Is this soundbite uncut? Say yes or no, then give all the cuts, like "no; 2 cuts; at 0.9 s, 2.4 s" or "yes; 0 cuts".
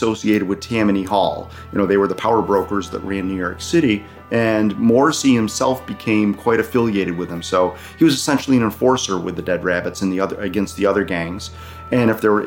yes; 0 cuts